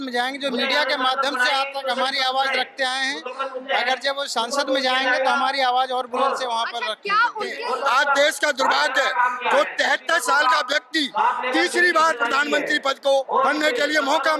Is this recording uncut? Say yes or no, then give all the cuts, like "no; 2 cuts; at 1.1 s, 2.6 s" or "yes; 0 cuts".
no; 2 cuts; at 7.5 s, 13.3 s